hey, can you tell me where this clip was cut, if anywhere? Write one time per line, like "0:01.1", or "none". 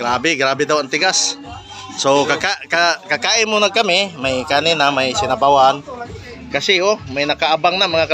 none